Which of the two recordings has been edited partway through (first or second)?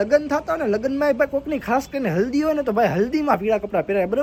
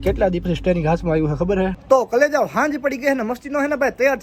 second